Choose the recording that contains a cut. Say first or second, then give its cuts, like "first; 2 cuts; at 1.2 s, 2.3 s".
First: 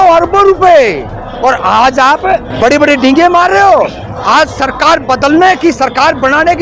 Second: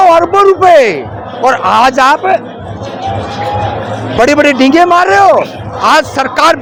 first; 1 cut; at 2.5 s